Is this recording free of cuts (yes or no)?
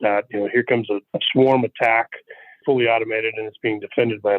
no